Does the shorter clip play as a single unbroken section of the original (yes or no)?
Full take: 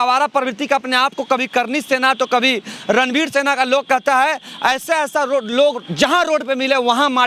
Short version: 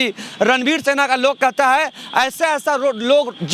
yes